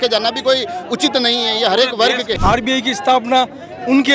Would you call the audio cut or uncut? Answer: cut